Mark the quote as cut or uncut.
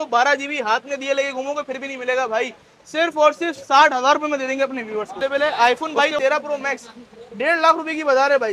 cut